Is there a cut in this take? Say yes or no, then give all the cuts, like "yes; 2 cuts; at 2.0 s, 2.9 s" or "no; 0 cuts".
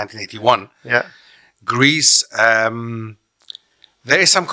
no; 0 cuts